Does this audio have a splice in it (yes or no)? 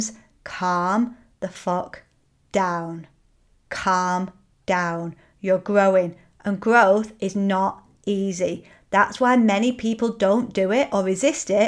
no